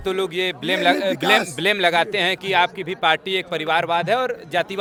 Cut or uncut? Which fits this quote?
uncut